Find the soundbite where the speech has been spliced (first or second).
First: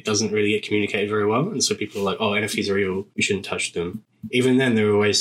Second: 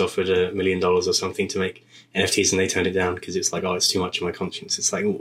first